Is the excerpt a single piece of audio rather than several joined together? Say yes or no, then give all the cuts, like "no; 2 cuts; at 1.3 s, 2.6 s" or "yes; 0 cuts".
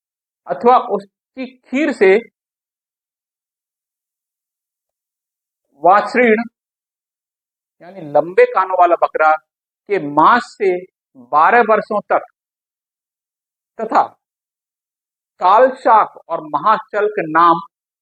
yes; 0 cuts